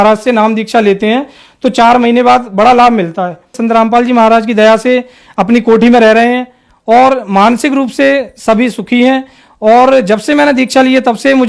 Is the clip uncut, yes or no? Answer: no